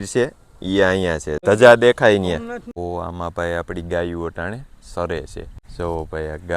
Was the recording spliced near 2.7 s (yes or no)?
yes